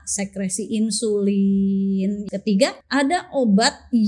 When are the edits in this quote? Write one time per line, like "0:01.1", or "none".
0:02.7